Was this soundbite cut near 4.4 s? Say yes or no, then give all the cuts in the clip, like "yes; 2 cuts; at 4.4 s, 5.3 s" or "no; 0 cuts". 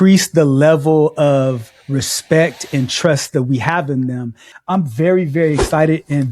yes; 1 cut; at 4.4 s